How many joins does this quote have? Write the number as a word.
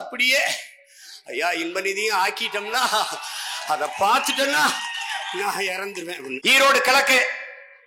one